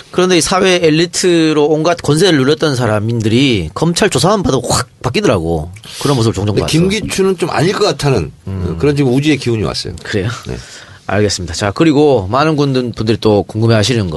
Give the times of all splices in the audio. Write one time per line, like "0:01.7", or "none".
0:01.0